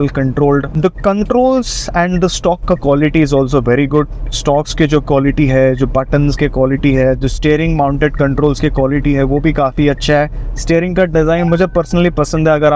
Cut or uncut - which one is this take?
uncut